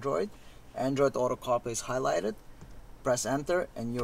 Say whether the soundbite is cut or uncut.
uncut